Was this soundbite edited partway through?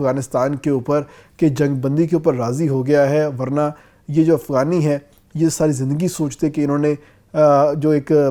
no; 0 cuts

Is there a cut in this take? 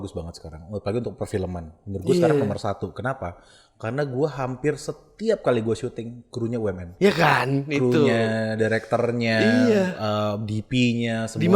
no; 0 cuts

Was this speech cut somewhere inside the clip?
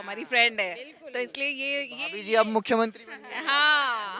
no; 0 cuts

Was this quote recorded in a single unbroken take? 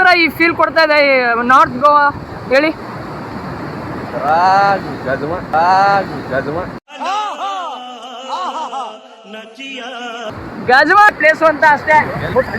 no; 1 cut; at 11.1 s

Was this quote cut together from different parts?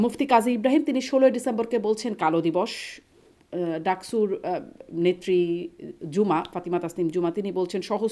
no; 0 cuts

